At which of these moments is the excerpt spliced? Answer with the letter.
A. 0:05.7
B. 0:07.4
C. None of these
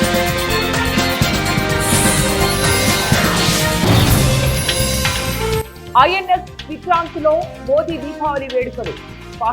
A